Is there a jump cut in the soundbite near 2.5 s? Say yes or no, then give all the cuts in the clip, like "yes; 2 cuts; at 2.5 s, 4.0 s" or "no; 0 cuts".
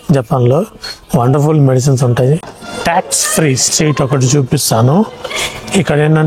yes; 1 cut; at 2.5 s